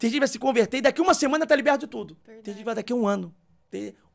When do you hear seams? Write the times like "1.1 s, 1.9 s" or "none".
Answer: none